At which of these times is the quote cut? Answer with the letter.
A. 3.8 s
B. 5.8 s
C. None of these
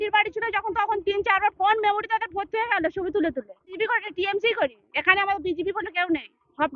A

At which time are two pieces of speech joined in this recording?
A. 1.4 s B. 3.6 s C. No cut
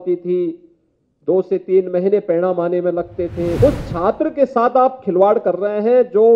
B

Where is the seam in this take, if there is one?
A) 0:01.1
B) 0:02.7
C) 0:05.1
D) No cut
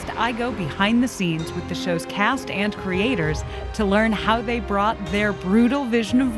D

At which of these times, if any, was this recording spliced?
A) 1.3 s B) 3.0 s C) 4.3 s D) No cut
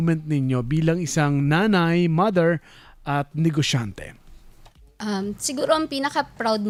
D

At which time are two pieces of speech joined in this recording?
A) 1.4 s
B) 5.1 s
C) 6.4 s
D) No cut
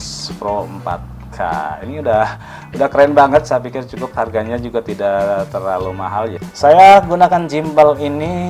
C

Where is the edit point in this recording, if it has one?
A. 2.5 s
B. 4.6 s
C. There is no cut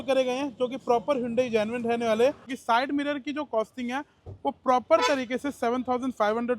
A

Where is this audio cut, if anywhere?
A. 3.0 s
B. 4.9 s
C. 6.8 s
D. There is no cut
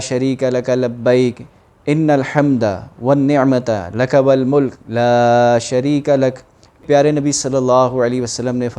C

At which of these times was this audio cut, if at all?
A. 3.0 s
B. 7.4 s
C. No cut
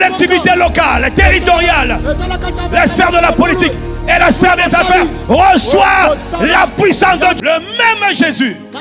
B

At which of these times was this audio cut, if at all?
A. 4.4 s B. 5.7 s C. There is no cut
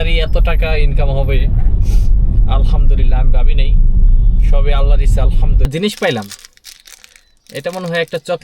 B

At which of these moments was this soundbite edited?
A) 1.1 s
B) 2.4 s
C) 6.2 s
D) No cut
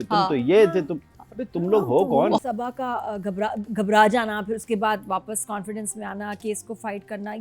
B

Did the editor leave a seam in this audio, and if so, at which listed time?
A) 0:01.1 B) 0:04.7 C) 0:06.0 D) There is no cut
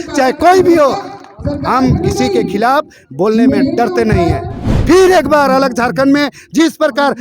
B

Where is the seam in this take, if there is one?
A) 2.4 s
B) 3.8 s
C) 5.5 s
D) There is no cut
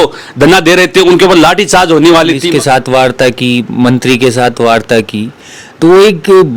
A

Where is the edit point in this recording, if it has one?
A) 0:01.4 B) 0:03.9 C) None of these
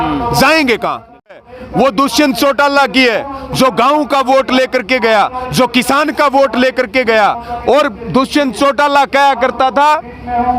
A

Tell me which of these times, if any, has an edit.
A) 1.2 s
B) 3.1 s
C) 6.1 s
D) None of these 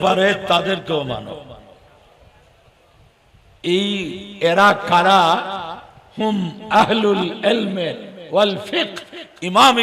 D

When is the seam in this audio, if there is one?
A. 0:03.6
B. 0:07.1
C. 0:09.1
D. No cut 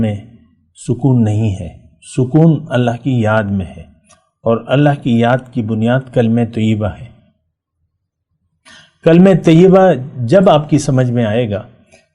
D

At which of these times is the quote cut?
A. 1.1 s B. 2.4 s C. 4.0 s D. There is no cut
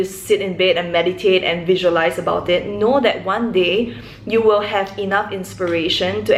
D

